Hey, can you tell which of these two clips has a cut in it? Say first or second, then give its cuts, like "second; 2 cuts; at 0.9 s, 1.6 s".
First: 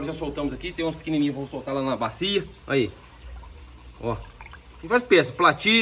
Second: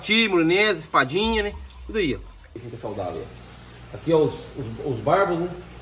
second; 1 cut; at 2.6 s